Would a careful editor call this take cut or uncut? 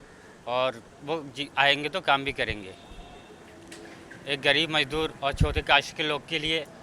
uncut